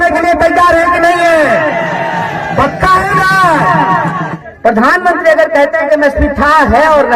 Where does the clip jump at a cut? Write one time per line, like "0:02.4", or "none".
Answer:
0:04.3